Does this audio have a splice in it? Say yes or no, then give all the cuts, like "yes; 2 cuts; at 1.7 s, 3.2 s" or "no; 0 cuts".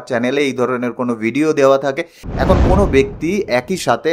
yes; 1 cut; at 2.3 s